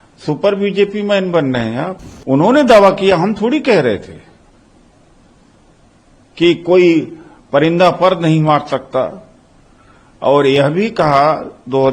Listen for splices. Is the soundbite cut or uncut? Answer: cut